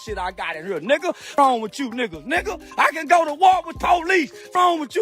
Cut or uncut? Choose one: cut